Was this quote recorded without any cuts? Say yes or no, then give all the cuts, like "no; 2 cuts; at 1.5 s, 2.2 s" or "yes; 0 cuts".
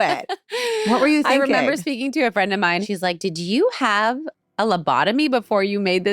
no; 1 cut; at 2.8 s